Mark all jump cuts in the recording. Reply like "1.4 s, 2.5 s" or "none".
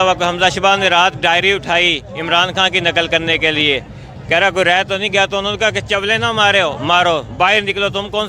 none